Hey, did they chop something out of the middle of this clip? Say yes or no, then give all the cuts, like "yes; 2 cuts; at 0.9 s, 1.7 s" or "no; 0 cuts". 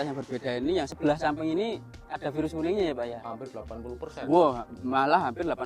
yes; 1 cut; at 0.9 s